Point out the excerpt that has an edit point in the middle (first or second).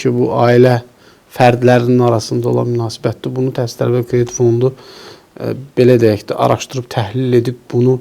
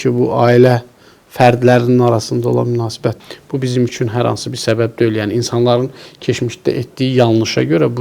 second